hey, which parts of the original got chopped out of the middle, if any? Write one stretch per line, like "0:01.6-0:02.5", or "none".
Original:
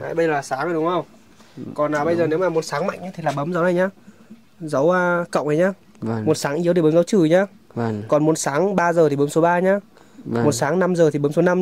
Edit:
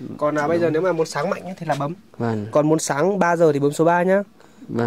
0:03.5-0:07.5